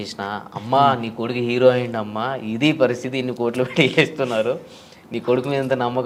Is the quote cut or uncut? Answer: uncut